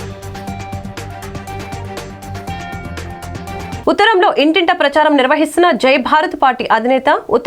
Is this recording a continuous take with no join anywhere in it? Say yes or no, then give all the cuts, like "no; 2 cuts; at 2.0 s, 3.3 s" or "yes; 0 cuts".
no; 1 cut; at 3.8 s